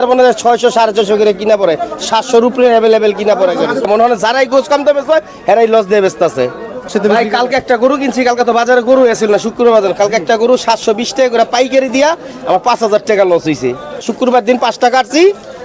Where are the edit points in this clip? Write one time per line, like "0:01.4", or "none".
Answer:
0:03.9
0:06.9
0:14.1